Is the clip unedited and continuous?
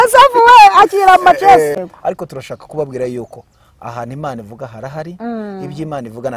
no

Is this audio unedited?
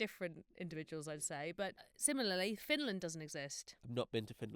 no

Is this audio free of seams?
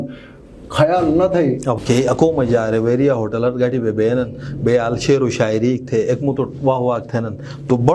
no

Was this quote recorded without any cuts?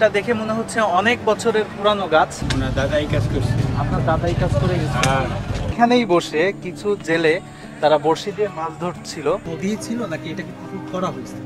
no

